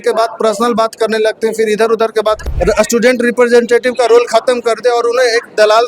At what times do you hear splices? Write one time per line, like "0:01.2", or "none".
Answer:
0:02.4